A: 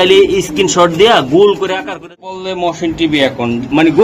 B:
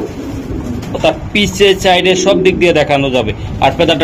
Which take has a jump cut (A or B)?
A